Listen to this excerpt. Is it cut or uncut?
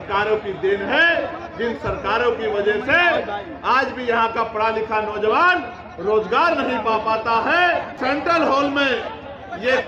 cut